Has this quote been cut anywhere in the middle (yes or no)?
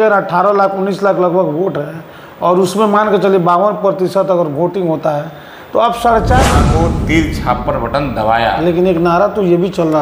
yes